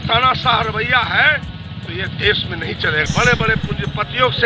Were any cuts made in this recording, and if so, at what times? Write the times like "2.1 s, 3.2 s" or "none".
3.0 s